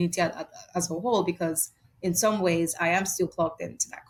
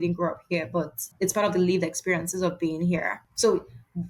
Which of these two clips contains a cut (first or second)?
second